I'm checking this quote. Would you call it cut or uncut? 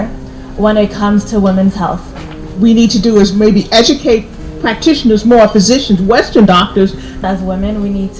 cut